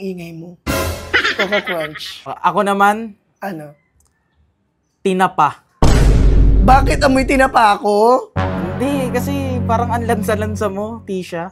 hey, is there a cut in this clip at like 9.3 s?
no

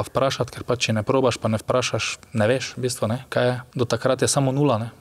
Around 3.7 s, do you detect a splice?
yes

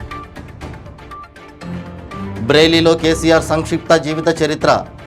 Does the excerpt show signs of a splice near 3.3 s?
no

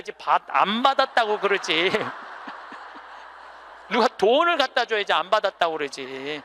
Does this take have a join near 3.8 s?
no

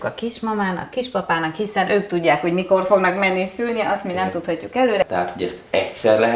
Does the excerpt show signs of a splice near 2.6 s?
no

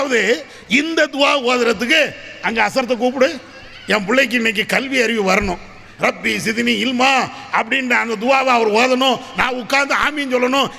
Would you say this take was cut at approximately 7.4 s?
no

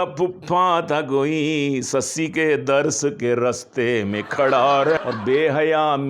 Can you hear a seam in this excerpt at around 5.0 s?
yes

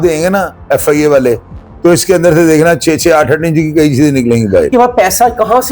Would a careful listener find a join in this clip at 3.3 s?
no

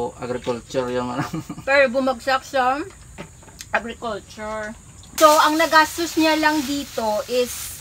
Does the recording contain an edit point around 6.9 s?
no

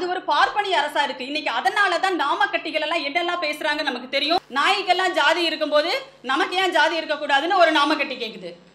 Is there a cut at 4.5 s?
yes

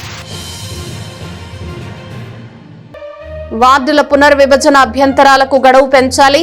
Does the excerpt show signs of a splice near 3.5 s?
yes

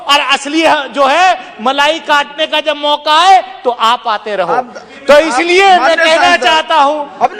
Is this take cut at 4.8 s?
no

